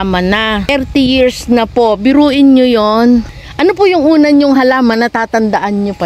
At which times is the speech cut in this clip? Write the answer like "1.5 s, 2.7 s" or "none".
0.7 s, 3.4 s